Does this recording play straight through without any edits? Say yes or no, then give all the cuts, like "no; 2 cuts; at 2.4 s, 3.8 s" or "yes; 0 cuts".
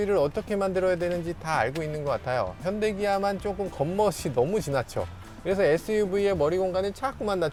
yes; 0 cuts